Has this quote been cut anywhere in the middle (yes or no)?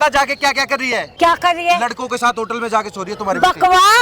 yes